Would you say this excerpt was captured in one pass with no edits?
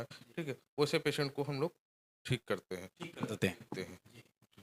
yes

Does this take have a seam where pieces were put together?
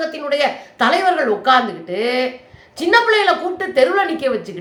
no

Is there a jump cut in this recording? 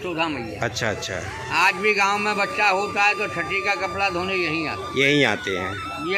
no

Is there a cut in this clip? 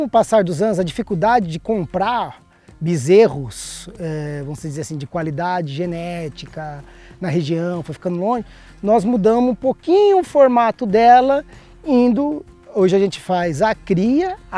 no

